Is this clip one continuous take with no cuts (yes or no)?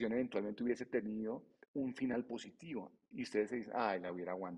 no